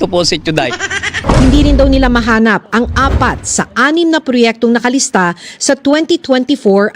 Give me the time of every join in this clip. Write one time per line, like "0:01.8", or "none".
0:01.2